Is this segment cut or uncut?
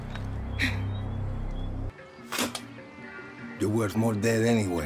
cut